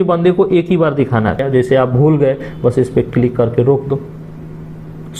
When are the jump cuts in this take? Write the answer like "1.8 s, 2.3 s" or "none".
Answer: 1.4 s